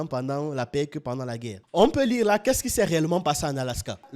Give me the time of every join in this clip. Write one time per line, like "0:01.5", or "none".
0:01.5